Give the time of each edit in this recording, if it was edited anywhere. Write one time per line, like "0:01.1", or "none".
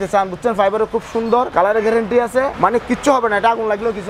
0:01.5
0:02.5

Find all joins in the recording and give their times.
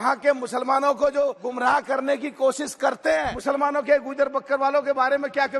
0:01.4
0:03.3

